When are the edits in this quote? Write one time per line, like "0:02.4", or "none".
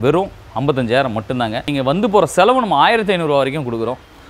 0:01.7